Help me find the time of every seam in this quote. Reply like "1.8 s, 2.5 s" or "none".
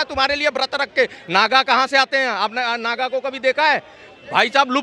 none

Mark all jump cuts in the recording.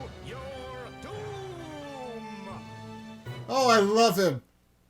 3.4 s

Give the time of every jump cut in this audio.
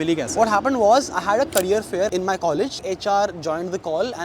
none

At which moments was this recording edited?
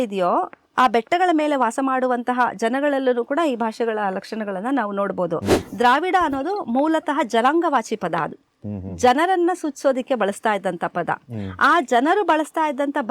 5.6 s

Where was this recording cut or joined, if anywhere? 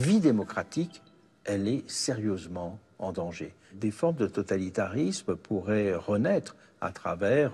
1.1 s, 3.8 s

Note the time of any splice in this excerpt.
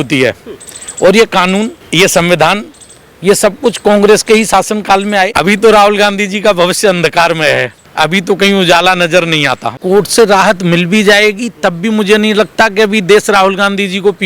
1.8 s, 5.3 s, 7.8 s, 9.8 s

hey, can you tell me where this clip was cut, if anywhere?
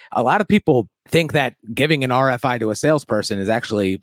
1.0 s

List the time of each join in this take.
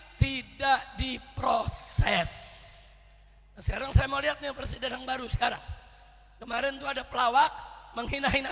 none

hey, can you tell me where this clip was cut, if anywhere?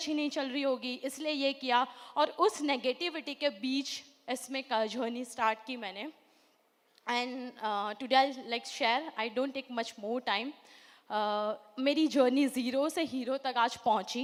none

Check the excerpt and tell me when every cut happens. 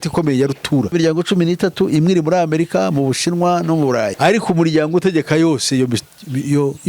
0.9 s, 4.1 s

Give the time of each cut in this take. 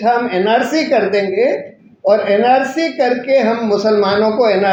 none

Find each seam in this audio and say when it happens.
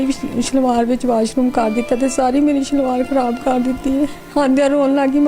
none

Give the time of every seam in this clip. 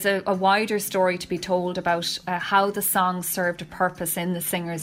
none

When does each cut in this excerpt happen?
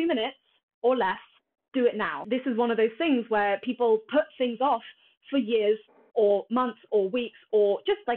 2.2 s

